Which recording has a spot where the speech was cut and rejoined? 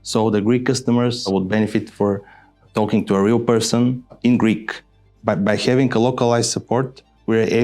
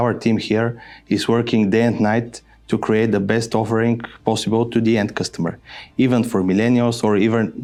first; 4 cuts; at 1.3 s, 2.6 s, 4.1 s, 5.1 s

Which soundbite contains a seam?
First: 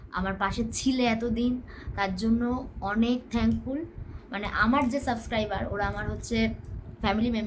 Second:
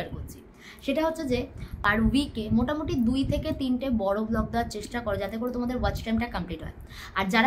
second; 1 cut; at 1.8 s

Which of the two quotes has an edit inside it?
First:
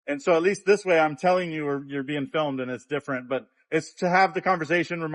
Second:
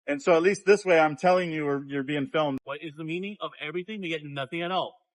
second; 1 cut; at 2.6 s

